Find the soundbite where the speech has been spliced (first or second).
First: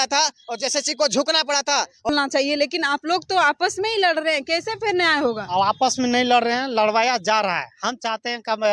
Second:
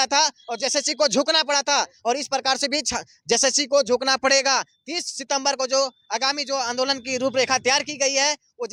first